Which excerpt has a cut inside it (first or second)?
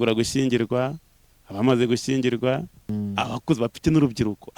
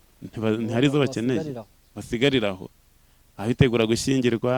first